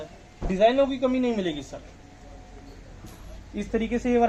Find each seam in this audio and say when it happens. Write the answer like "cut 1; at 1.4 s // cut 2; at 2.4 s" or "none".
none